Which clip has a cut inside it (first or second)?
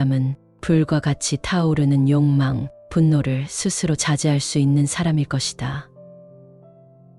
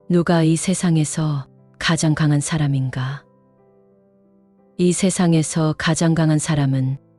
first